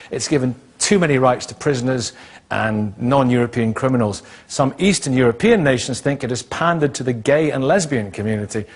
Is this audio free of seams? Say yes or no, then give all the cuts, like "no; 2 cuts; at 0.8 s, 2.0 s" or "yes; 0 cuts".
yes; 0 cuts